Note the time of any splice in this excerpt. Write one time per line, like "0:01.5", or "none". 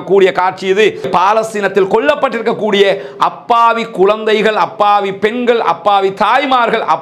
0:01.1